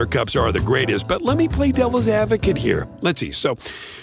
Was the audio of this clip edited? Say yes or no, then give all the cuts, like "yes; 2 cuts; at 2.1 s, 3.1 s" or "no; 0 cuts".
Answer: no; 0 cuts